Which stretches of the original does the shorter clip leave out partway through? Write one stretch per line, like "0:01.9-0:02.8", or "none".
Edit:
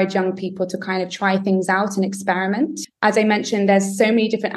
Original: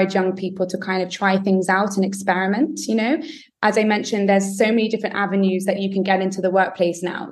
0:02.8-0:03.4